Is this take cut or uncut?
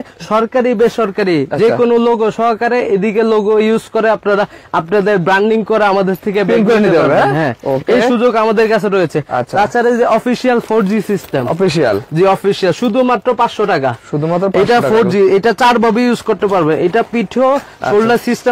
uncut